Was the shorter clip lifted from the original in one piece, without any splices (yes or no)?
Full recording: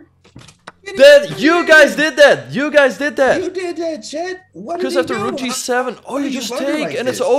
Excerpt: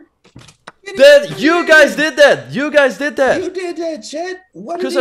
yes